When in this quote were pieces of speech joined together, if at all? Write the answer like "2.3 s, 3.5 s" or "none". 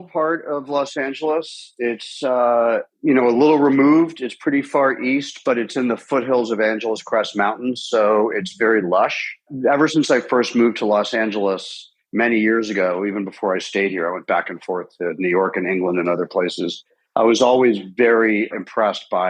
none